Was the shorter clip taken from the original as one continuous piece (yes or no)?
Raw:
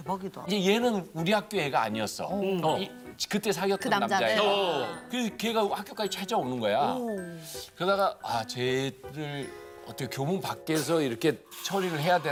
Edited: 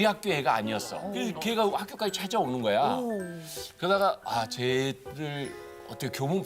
no